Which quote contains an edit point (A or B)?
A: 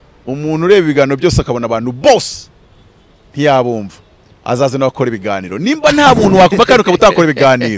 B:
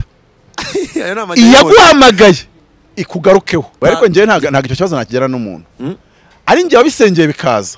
B